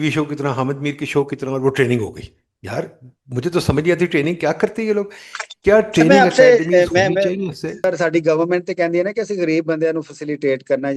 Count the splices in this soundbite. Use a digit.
1